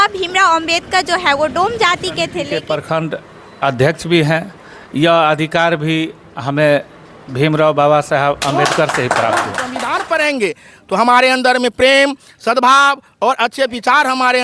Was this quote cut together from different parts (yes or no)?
yes